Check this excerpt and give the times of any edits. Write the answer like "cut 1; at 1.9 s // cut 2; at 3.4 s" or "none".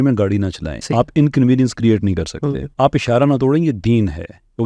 cut 1; at 0.9 s // cut 2; at 2.7 s